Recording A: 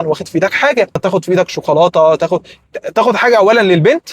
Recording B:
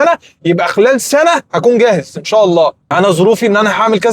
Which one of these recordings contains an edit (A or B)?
A